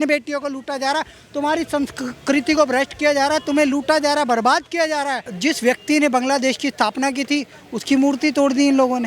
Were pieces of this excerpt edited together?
yes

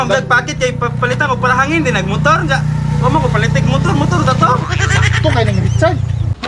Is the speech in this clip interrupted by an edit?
no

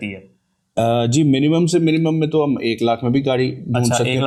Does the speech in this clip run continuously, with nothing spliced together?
yes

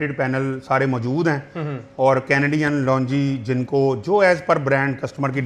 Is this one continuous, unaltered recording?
yes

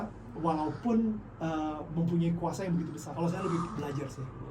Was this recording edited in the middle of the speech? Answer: yes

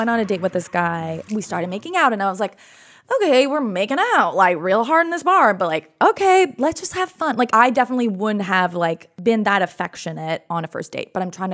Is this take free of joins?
no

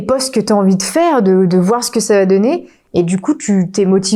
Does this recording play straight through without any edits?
yes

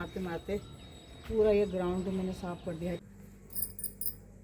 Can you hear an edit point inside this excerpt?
yes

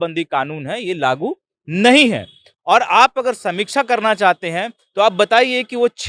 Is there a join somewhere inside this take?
no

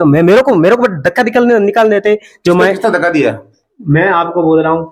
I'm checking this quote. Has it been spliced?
no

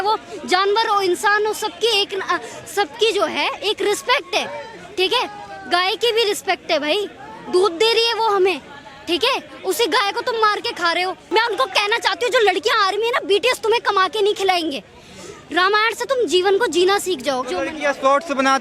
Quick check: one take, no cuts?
no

